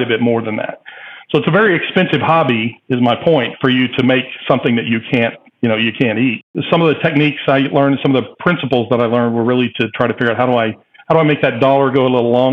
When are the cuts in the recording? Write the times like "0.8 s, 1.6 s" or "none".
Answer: 6.4 s